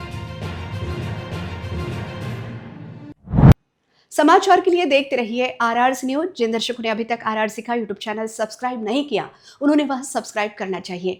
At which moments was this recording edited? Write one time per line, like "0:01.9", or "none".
none